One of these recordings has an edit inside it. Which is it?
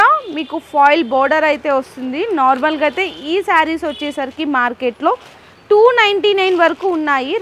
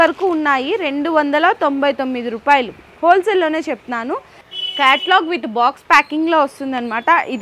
second; 1 cut; at 4.4 s

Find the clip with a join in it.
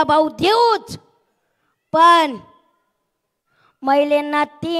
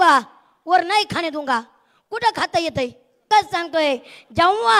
second; 1 cut; at 3.2 s

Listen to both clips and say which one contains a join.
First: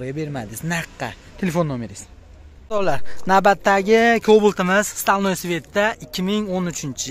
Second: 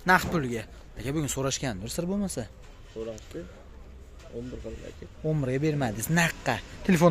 first; 1 cut; at 2.7 s

